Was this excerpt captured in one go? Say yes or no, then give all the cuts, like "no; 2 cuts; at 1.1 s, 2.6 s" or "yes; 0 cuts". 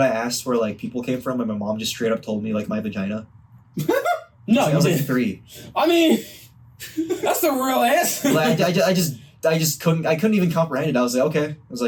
yes; 0 cuts